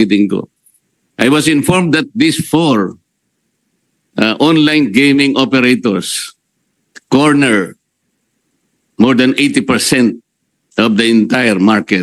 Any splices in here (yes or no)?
no